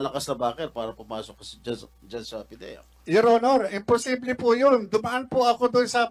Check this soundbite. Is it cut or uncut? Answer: cut